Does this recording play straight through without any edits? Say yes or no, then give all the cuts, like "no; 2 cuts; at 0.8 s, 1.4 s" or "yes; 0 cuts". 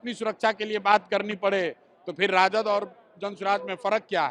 yes; 0 cuts